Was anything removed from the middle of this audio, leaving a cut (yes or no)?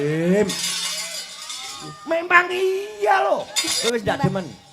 yes